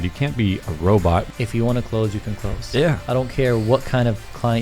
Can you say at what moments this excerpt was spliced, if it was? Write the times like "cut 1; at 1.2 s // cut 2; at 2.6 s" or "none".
cut 1; at 1.3 s